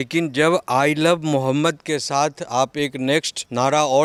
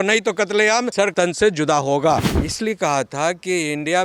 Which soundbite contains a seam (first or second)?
second